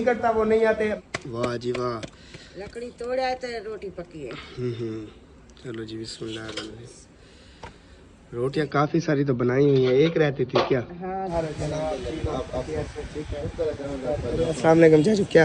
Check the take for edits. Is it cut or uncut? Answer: cut